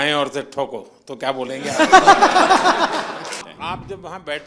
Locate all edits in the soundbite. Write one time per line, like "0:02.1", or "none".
0:03.5